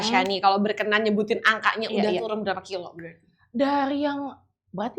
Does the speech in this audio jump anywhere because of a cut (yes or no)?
no